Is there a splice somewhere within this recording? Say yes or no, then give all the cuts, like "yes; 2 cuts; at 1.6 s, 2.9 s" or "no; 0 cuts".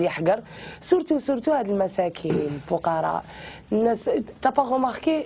no; 0 cuts